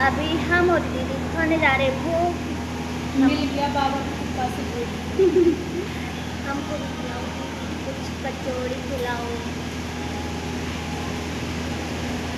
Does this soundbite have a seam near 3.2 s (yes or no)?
no